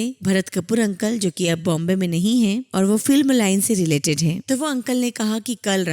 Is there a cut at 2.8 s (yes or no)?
no